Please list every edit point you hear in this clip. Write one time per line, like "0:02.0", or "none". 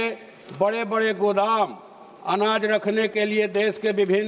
none